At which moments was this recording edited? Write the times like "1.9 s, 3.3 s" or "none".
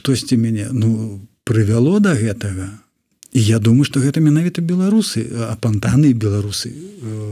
none